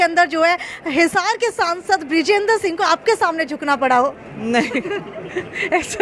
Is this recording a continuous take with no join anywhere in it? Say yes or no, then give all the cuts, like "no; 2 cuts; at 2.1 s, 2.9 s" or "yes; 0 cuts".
yes; 0 cuts